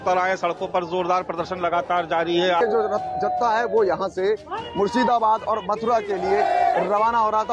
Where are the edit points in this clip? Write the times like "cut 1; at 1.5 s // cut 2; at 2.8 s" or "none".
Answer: cut 1; at 2.6 s